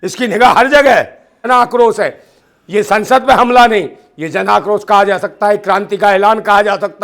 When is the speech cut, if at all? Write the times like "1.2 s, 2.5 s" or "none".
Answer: 1.5 s

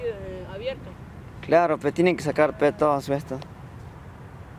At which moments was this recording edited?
none

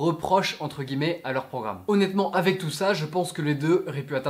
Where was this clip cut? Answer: 1.8 s

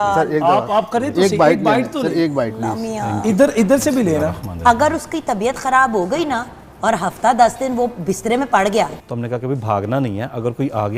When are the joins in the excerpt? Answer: 8.9 s

